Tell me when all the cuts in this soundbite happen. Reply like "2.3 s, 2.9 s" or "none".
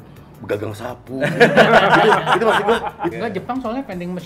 3.1 s